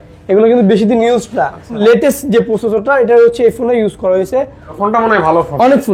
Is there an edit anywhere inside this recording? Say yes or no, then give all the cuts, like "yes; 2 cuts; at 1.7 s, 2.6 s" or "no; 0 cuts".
yes; 2 cuts; at 1.8 s, 4.7 s